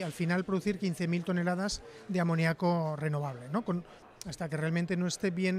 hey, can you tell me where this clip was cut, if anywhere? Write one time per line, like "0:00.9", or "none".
0:03.9